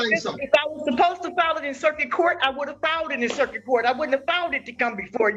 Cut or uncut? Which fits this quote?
uncut